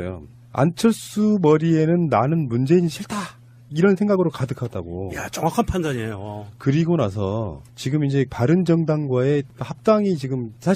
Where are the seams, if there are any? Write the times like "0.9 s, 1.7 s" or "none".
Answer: none